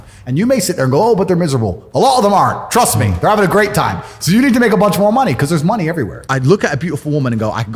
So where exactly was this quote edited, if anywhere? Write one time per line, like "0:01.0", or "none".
0:06.2

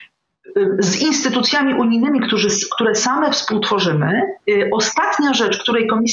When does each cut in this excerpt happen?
0:04.4

